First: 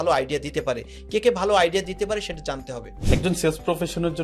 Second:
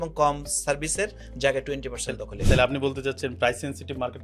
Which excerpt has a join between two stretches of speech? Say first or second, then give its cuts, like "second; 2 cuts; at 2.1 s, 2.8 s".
first; 1 cut; at 2.9 s